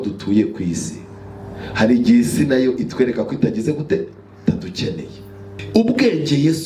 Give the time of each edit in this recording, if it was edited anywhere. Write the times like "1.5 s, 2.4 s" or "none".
5.5 s